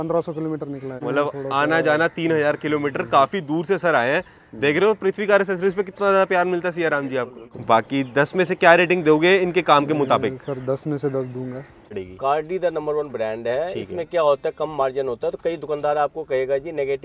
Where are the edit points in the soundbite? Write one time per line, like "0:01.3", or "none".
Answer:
0:00.9
0:07.5
0:11.9